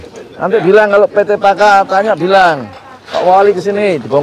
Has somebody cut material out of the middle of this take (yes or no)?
no